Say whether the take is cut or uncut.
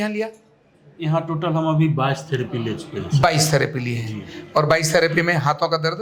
uncut